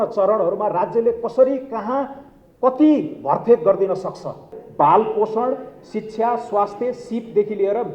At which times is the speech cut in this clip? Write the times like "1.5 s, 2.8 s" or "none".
4.6 s

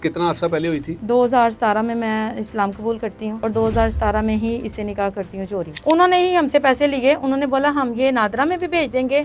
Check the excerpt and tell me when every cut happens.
0.9 s, 3.4 s, 5.8 s

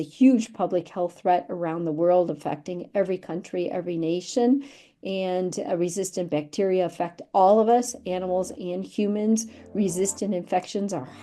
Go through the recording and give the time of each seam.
none

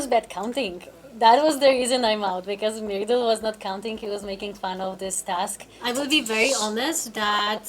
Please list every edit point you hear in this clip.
5.7 s

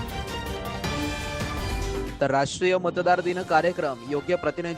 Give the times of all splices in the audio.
2.1 s

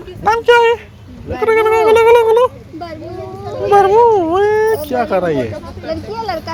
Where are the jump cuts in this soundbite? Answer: none

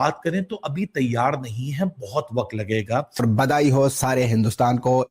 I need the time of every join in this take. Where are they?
3.2 s

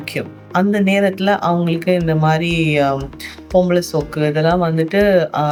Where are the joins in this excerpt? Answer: none

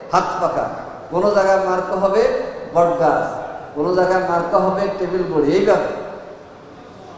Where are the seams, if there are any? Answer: none

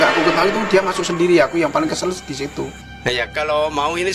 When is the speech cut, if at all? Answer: 2.9 s

